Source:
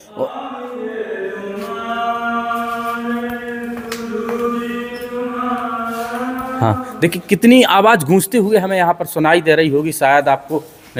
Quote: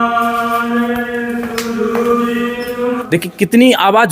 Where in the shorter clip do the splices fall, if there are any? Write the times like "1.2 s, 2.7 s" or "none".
3.0 s